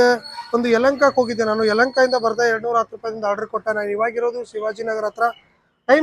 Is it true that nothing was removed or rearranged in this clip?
yes; 0 cuts

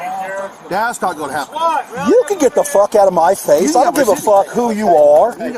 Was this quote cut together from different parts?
no; 0 cuts

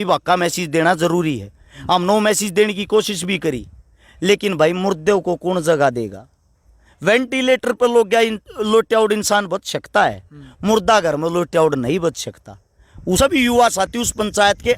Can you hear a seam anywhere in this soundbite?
yes; 1 cut; at 13.2 s

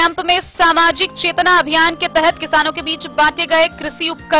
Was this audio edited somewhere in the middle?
no; 0 cuts

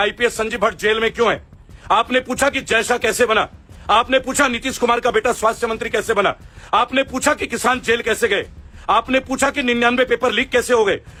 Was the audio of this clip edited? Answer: no; 0 cuts

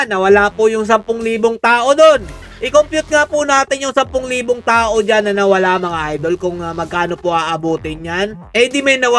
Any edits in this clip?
no; 0 cuts

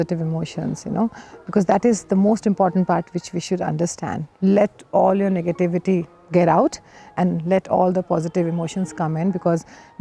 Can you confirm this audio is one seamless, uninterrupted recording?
yes; 0 cuts

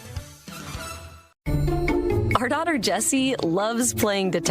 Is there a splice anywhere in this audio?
yes; 1 cut; at 1.4 s

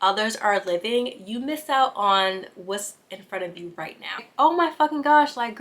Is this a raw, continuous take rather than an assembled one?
no; 1 cut; at 4.3 s

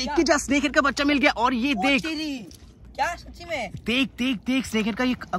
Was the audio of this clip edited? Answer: no; 0 cuts

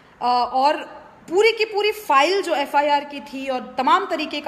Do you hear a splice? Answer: no; 0 cuts

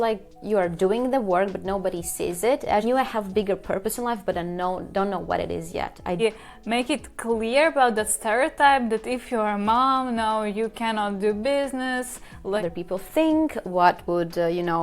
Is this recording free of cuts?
no; 3 cuts; at 2.8 s, 6.2 s, 12.6 s

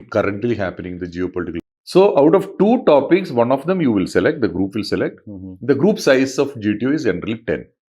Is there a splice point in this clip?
yes; 1 cut; at 1.6 s

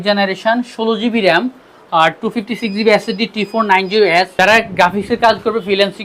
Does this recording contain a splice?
yes; 1 cut; at 4.3 s

